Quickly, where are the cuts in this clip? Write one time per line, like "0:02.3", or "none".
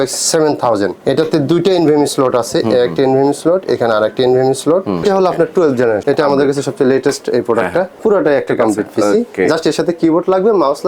0:01.0
0:05.0
0:06.0
0:07.9